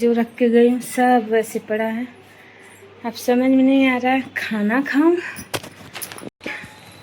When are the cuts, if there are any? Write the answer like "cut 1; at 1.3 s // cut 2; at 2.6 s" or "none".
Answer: none